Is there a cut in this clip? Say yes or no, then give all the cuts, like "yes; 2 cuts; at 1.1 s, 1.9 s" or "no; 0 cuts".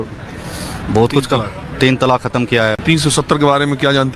yes; 1 cut; at 2.8 s